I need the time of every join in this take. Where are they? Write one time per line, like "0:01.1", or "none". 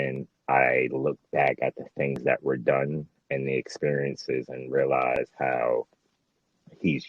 none